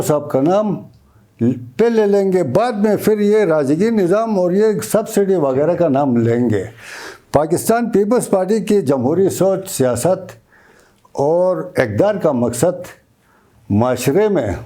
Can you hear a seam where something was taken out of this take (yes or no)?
no